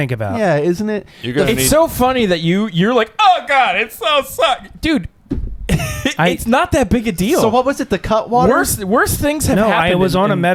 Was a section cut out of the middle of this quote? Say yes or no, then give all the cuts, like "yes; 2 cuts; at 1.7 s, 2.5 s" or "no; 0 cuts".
no; 0 cuts